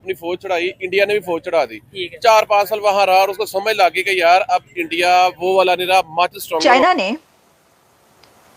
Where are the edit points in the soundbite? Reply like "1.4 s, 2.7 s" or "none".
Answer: 6.6 s